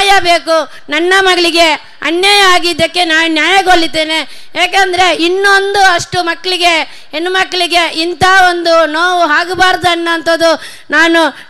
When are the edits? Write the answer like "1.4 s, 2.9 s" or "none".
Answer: none